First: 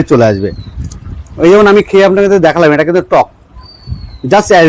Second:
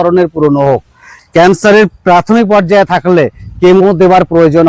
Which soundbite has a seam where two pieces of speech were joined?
second; 1 cut; at 1.1 s

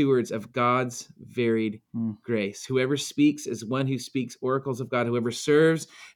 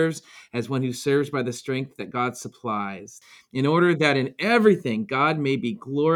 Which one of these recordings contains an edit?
second; 1 cut; at 3.3 s

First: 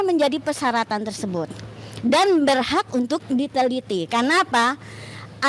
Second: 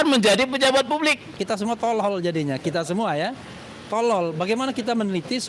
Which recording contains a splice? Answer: second; 1 cut; at 1.4 s

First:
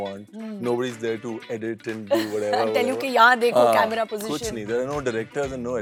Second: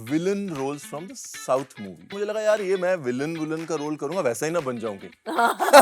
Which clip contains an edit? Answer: second; 1 cut; at 2.1 s

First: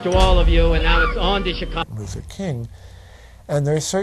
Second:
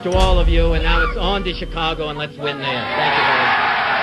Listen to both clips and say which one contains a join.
second; 1 cut; at 1.8 s

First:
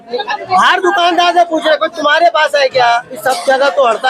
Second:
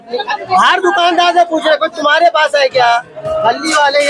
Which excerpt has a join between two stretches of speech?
first; 1 cut; at 3.2 s

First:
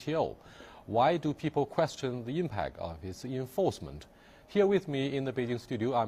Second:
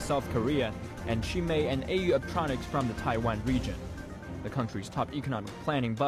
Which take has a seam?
first; 1 cut; at 5.0 s

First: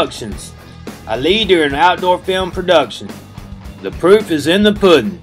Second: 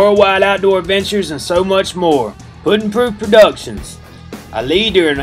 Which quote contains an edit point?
second; 1 cut; at 2.4 s

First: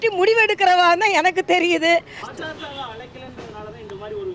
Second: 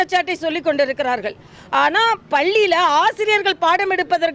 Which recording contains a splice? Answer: first; 1 cut; at 2.2 s

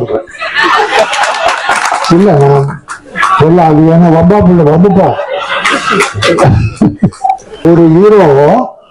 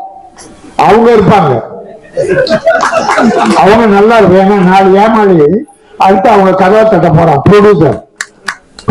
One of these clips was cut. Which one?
first; 1 cut; at 7.6 s

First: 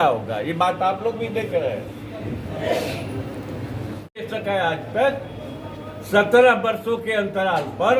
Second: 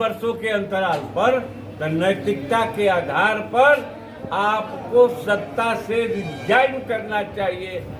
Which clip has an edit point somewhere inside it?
first; 1 cut; at 4.0 s

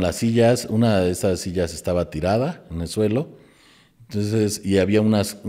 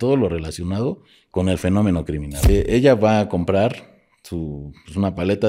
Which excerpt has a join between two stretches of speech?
second; 1 cut; at 2.5 s

